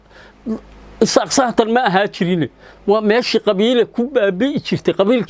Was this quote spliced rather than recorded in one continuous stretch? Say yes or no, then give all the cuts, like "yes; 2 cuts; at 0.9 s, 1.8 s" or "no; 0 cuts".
no; 0 cuts